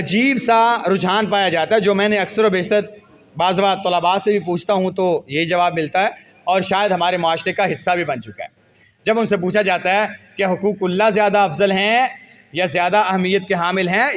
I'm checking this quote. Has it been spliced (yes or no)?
no